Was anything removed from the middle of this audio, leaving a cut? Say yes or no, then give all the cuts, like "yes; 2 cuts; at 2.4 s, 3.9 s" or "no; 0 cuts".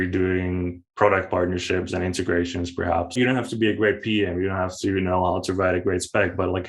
yes; 1 cut; at 3.1 s